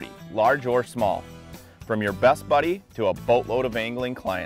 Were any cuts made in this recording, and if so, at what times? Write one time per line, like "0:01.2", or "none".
0:02.9